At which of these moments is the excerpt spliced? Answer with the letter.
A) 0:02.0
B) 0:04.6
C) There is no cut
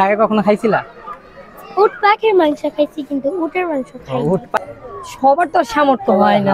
B